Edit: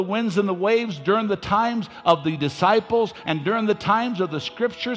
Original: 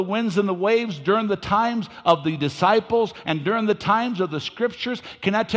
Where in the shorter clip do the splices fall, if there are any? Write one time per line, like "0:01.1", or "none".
none

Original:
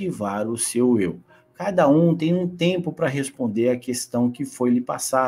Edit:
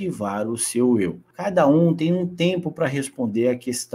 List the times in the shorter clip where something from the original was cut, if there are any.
0:01.3

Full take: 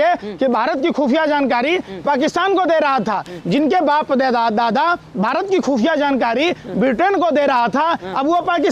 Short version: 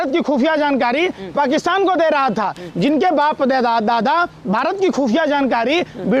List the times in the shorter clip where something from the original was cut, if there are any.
none

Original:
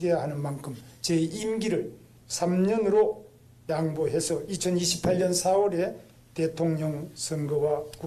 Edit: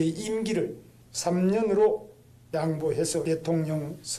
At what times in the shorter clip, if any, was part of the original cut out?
0:03.2

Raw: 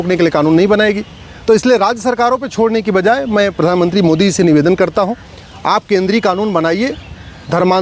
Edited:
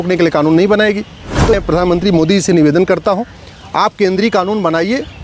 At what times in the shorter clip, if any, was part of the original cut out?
0:01.5

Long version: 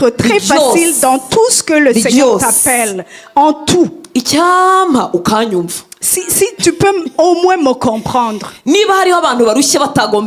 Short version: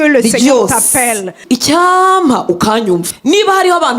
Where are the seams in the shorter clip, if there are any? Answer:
0:01.4
0:03.1

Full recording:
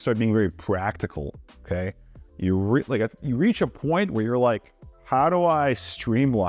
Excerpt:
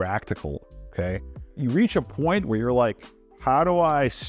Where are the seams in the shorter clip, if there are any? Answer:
0:01.5

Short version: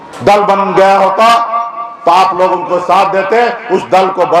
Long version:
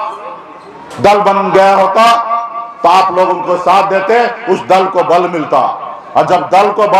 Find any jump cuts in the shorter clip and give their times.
none

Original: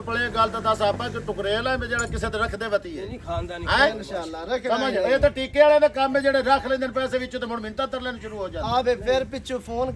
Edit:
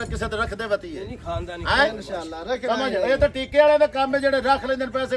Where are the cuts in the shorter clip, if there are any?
none

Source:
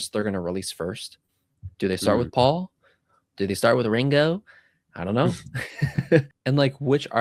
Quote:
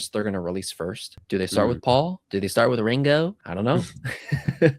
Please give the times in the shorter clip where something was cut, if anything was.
0:01.1
0:02.2
0:03.4

